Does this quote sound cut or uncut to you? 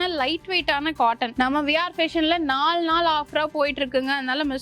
cut